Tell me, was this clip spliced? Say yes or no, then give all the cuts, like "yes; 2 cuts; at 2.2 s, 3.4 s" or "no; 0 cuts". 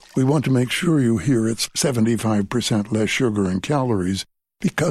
no; 0 cuts